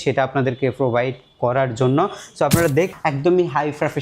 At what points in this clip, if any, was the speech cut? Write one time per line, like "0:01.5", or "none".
0:02.9